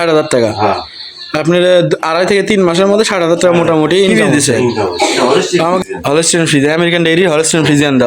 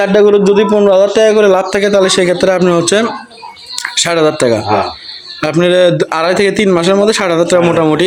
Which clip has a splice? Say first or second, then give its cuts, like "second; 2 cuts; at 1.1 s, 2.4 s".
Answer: first; 1 cut; at 5.8 s